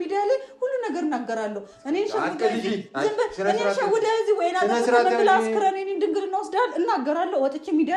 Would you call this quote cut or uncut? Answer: uncut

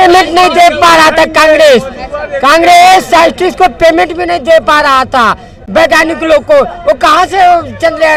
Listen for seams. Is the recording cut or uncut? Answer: uncut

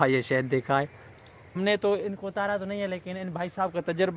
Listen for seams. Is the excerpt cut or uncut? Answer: cut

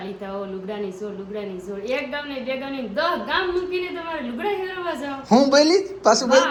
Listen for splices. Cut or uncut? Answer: uncut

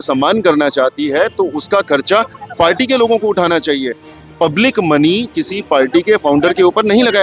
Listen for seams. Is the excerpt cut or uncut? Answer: uncut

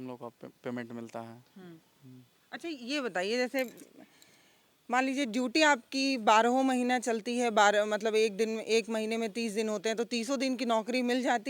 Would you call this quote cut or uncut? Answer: uncut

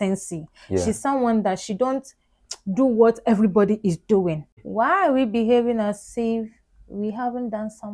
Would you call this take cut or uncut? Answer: cut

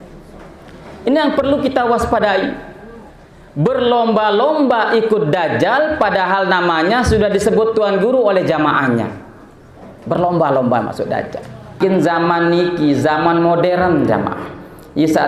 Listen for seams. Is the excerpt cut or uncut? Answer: cut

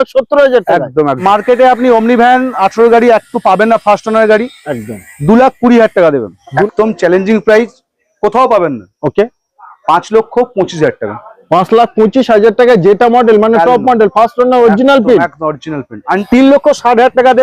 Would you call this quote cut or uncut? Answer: cut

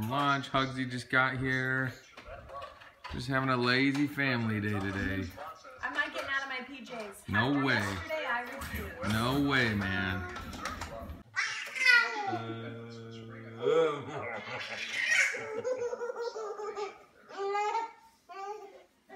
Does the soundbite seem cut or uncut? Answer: uncut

